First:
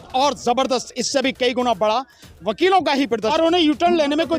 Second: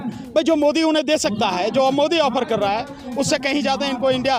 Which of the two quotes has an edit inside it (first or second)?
first